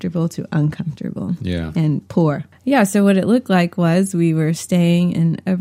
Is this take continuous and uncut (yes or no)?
no